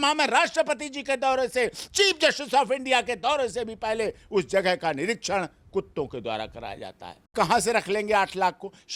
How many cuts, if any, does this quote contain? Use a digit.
1